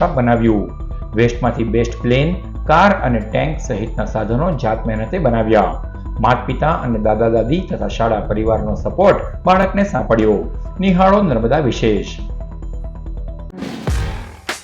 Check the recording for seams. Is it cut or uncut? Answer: cut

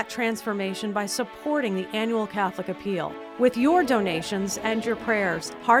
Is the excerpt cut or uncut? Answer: uncut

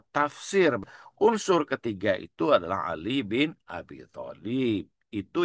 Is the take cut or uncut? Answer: cut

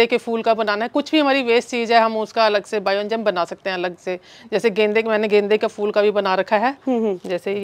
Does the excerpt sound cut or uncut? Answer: uncut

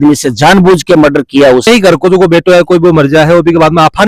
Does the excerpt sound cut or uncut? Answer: cut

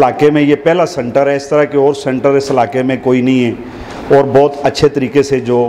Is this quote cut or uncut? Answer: uncut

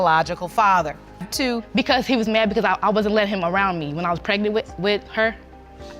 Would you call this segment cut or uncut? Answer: cut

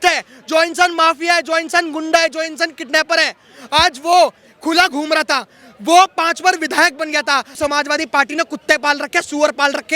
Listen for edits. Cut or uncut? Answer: cut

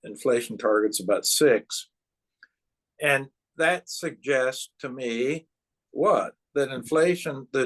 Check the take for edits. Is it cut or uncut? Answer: uncut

